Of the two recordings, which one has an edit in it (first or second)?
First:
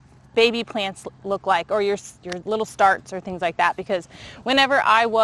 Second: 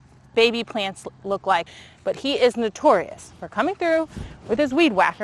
second